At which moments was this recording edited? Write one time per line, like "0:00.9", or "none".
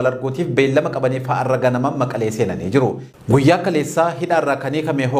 0:03.2